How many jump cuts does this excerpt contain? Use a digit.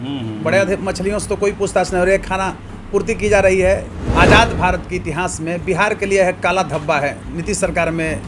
1